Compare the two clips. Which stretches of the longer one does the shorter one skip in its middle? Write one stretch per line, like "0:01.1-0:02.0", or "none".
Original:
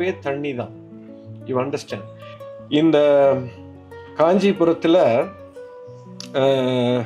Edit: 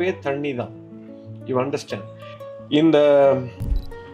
none